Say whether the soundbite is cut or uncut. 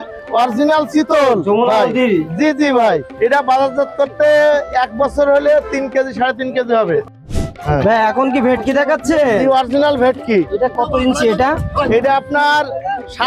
cut